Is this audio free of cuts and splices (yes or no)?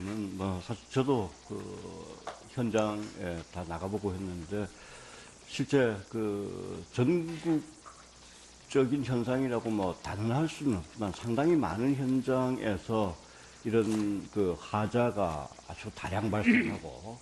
yes